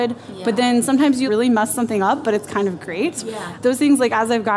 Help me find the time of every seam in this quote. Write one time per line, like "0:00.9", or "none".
0:01.2
0:03.5